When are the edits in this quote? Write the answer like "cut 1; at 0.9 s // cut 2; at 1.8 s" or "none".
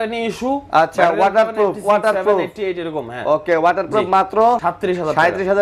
cut 1; at 4.7 s